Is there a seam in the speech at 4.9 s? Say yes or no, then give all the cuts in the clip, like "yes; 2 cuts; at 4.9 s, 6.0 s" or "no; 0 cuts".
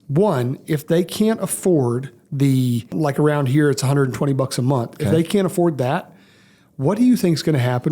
no; 1 cut; at 2.9 s